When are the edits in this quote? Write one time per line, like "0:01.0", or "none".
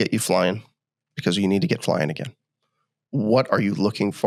none